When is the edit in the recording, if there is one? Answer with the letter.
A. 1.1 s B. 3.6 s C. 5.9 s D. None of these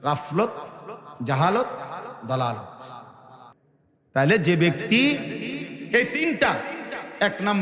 B